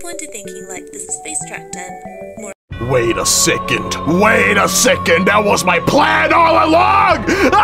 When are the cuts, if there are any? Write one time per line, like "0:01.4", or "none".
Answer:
none